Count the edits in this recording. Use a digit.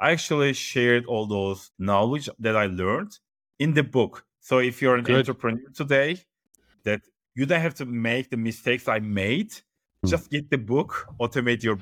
0